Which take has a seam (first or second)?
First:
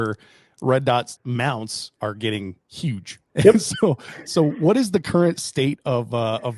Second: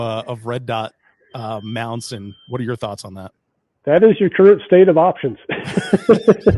first